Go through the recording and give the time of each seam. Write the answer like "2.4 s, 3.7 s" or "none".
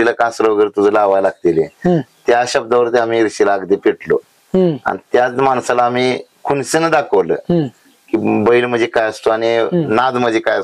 none